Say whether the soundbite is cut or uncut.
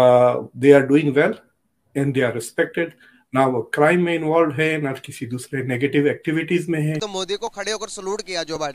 cut